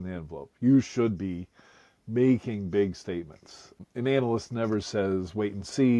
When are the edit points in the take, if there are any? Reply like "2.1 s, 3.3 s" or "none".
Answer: 3.8 s